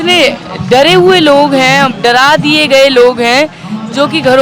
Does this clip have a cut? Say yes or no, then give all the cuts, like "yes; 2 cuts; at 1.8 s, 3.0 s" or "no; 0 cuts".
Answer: no; 0 cuts